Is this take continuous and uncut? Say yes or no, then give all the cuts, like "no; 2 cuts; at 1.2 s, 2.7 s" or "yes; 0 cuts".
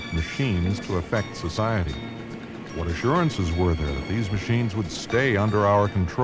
no; 1 cut; at 3.8 s